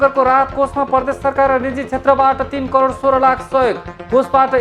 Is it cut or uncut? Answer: uncut